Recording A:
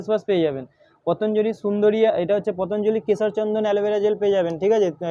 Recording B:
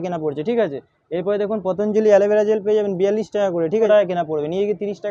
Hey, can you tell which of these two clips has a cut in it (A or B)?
B